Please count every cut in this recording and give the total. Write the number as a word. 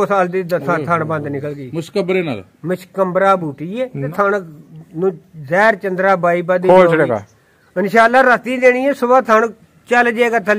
one